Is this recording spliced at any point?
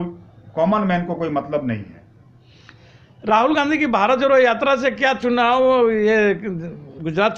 no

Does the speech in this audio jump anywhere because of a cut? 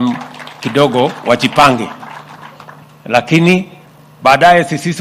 no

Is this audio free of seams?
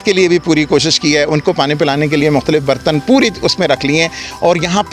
yes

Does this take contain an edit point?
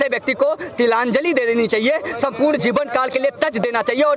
no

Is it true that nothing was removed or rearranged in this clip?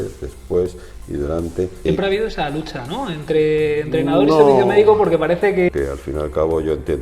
no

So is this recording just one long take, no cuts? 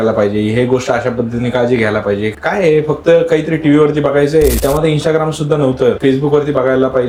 yes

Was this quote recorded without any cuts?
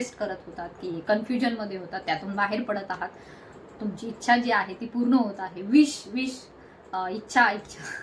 yes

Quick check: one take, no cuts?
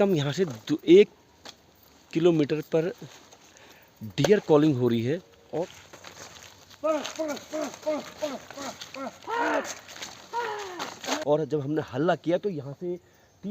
no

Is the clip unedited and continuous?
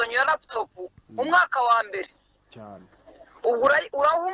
yes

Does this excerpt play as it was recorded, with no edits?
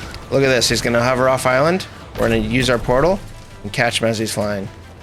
yes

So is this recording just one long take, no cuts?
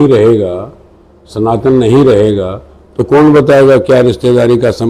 yes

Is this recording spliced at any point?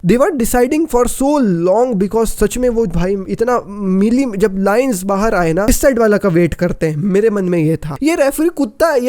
yes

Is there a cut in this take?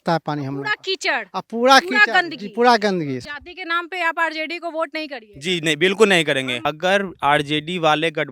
yes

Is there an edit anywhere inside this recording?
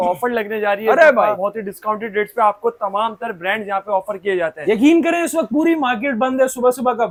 no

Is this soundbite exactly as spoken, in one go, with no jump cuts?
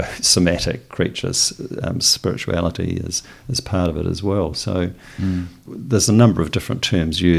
no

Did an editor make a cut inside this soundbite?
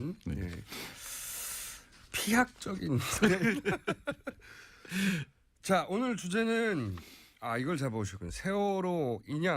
yes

